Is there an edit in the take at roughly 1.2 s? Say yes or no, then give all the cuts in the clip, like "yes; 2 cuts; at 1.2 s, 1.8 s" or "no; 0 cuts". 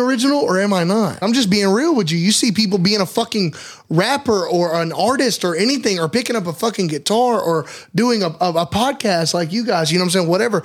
yes; 1 cut; at 1.2 s